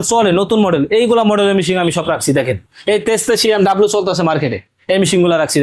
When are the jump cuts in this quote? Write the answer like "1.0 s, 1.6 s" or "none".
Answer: 2.7 s